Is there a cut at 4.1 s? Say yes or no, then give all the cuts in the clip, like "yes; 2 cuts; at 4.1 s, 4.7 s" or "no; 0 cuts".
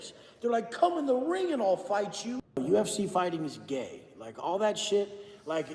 no; 1 cut; at 2.4 s